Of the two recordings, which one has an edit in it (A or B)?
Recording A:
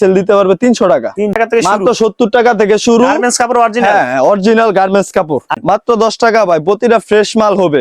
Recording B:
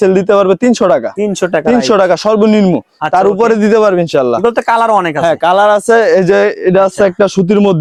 A